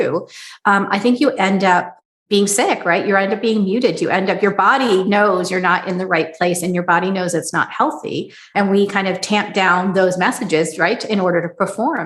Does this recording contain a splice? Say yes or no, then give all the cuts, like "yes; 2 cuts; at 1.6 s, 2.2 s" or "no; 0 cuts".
yes; 2 cuts; at 2.0 s, 8.5 s